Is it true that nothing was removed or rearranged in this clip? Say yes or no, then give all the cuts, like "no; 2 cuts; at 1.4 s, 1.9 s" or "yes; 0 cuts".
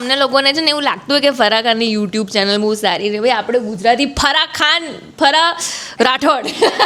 yes; 0 cuts